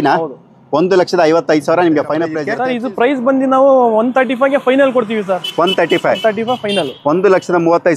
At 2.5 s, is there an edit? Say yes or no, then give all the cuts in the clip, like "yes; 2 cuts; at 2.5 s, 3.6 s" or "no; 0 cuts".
yes; 1 cut; at 2.5 s